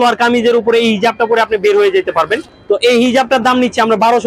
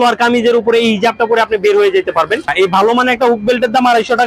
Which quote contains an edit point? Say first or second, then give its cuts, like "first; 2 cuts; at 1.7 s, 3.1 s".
second; 1 cut; at 2.5 s